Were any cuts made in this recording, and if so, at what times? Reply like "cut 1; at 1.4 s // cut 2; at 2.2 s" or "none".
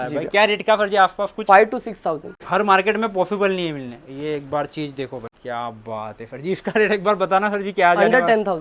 cut 1; at 2.3 s // cut 2; at 5.3 s